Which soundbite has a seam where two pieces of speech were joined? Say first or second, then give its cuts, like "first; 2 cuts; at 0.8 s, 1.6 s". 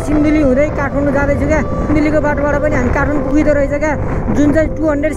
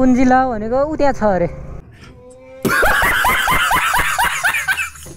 first; 1 cut; at 1.9 s